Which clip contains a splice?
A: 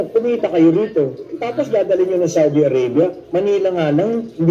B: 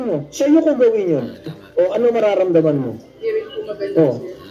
B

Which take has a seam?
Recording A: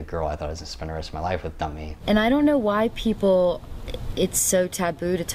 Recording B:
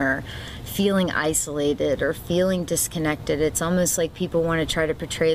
A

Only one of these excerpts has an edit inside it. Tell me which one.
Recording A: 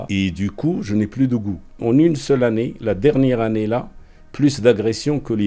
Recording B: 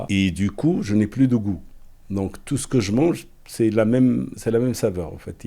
A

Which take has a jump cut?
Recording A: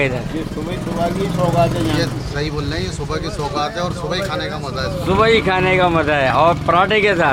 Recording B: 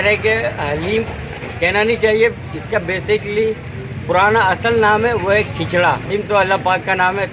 B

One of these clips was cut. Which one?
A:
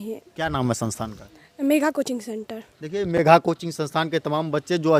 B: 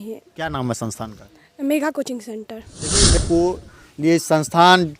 B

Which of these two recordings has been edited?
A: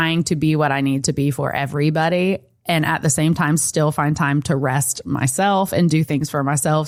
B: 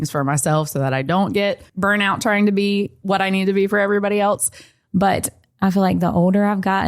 B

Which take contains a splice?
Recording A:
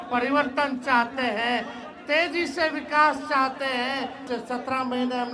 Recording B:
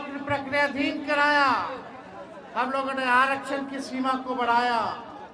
A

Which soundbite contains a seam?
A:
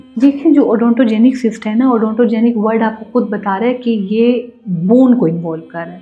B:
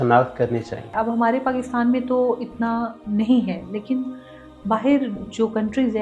B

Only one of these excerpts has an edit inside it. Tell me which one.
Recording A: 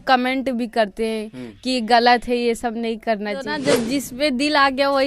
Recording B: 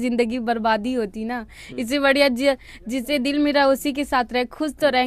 A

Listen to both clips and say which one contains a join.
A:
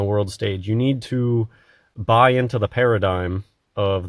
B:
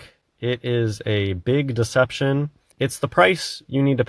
B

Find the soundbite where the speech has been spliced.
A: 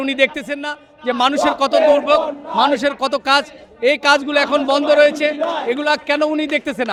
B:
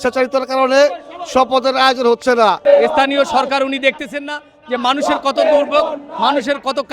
B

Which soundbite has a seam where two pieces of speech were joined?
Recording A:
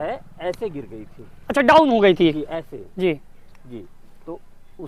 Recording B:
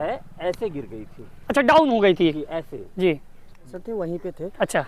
B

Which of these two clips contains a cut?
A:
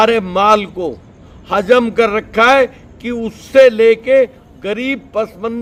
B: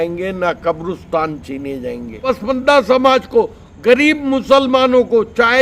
B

